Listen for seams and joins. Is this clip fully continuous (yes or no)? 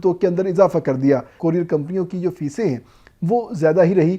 no